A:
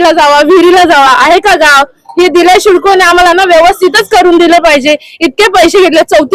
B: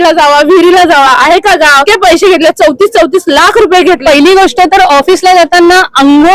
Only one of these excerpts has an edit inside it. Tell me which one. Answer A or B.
B